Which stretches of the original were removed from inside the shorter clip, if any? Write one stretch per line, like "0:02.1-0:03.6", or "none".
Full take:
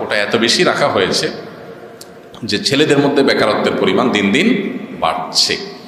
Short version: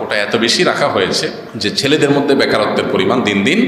0:01.5-0:02.3